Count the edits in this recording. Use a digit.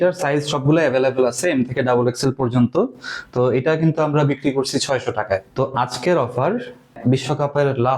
2